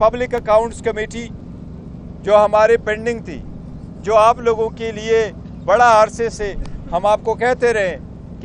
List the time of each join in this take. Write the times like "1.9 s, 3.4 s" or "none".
none

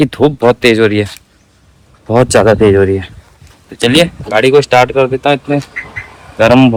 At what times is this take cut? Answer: none

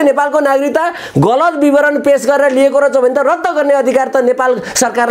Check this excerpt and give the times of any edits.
none

